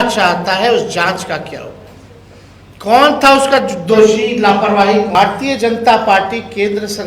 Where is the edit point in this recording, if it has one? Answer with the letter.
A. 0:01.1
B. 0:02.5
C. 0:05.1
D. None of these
C